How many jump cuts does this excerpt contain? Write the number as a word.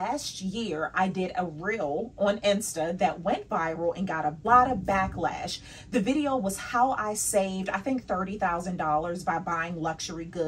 one